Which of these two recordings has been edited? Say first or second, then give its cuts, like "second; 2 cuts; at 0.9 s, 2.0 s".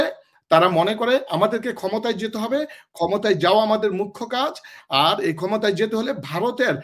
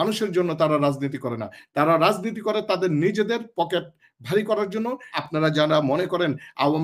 second; 1 cut; at 5.1 s